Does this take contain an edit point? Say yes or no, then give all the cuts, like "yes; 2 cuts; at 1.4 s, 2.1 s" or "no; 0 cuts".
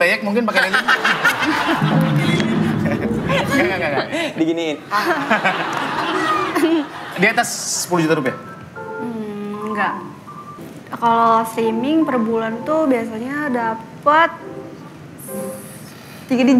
yes; 1 cut; at 10.6 s